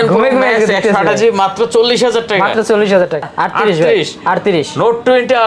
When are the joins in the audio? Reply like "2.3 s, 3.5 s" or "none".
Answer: 3.3 s